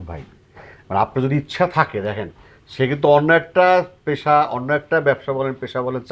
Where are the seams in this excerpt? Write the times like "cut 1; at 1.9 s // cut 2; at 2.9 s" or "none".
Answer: none

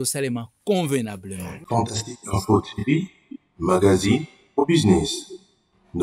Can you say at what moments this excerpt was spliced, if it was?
cut 1; at 1.7 s

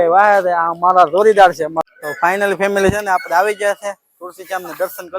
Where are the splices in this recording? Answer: cut 1; at 1.8 s

